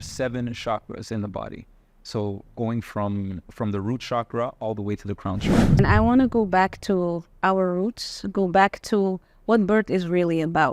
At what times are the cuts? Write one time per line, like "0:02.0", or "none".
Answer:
0:05.8